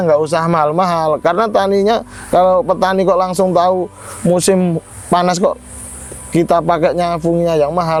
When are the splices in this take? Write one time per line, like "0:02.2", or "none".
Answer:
none